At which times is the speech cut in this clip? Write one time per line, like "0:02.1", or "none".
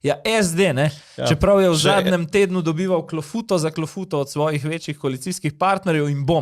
none